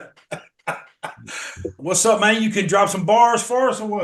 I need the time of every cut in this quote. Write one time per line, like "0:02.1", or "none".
0:01.8